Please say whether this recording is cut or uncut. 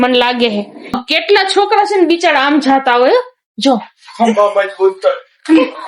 cut